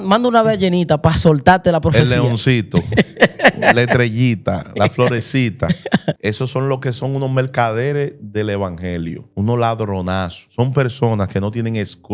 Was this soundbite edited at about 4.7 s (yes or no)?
no